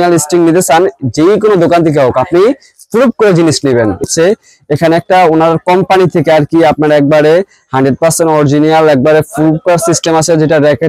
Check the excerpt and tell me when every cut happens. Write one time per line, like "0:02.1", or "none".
0:04.0